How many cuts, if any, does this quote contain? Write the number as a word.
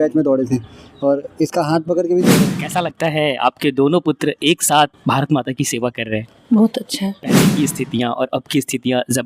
two